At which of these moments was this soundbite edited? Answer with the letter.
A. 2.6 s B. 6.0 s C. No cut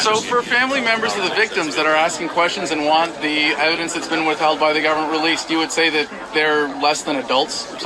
C